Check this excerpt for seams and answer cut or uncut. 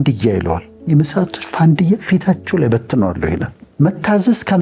cut